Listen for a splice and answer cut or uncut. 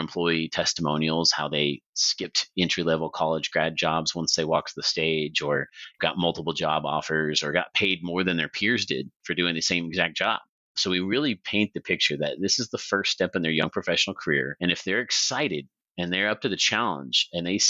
uncut